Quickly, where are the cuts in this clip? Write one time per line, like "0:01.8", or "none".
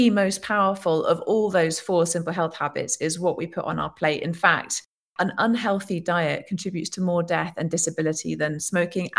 0:05.1